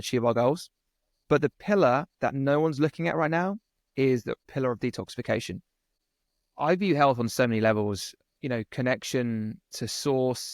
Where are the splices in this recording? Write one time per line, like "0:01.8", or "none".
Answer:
0:04.4
0:06.0